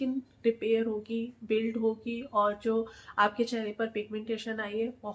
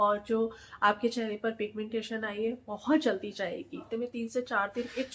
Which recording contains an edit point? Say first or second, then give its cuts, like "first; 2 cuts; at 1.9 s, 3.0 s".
second; 1 cut; at 3.8 s